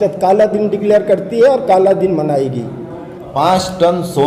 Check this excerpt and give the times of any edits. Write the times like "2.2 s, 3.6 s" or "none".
3.3 s